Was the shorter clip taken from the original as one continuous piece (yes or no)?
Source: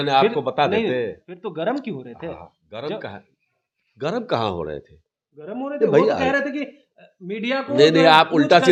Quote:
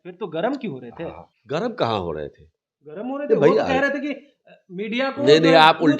no